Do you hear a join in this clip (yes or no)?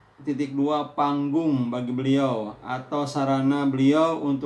no